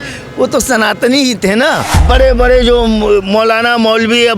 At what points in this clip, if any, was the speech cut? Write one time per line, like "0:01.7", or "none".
0:01.9